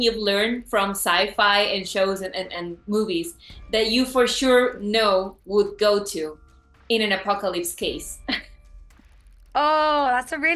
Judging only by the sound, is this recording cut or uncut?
uncut